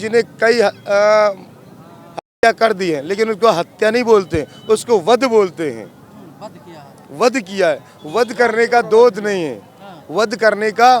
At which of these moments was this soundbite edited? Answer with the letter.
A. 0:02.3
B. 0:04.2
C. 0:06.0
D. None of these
D